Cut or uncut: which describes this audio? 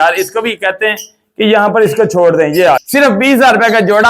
cut